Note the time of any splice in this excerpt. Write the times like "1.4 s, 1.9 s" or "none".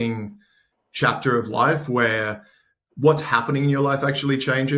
none